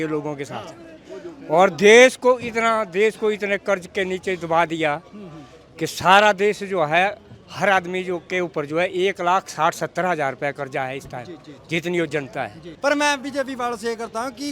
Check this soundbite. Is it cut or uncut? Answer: cut